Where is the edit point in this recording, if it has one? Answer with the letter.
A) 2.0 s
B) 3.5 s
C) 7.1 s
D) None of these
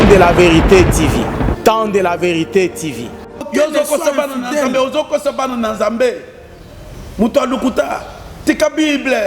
B